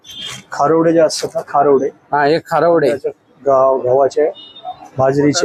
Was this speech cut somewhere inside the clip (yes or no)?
no